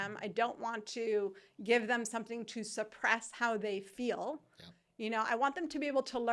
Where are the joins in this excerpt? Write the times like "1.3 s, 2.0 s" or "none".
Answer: none